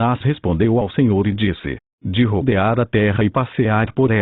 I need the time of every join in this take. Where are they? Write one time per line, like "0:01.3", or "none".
0:00.9